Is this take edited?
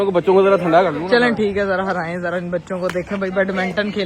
no; 0 cuts

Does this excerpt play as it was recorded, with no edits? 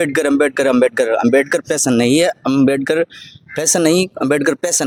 yes; 0 cuts

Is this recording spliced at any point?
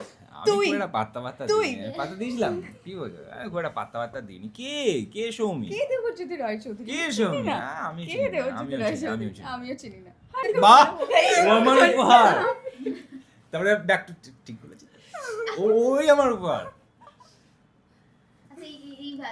yes; 1 cut; at 10.5 s

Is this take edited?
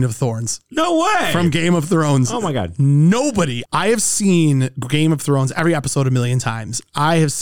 no; 0 cuts

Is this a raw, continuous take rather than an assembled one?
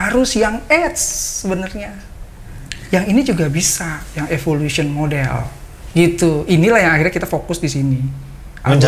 yes; 0 cuts

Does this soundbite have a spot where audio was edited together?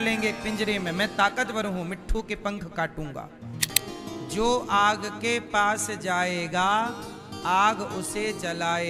yes; 1 cut; at 3.7 s

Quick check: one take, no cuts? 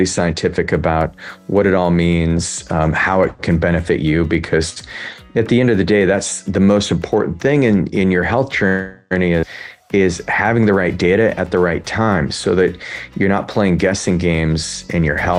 yes; 0 cuts

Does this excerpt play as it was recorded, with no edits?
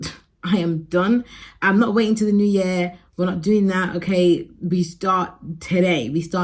yes; 0 cuts

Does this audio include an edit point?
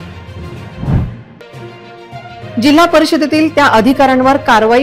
yes; 1 cut; at 0.9 s

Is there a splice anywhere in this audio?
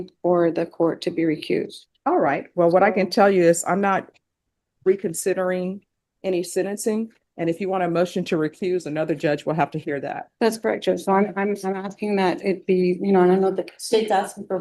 no; 0 cuts

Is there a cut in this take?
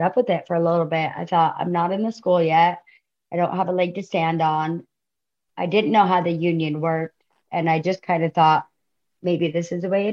no; 0 cuts

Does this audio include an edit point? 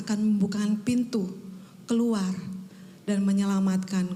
no; 0 cuts

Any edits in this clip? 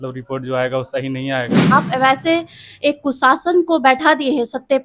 yes; 1 cut; at 1.7 s

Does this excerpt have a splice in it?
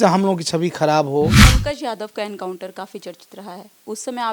yes; 1 cut; at 1.5 s

